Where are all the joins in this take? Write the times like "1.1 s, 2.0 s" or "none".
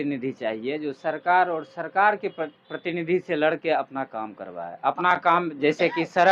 none